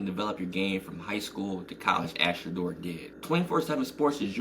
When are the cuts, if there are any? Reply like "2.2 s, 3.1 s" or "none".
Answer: 3.1 s